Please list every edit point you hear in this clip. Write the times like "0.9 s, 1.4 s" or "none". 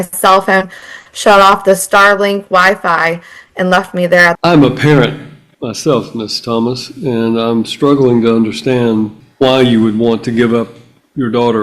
4.4 s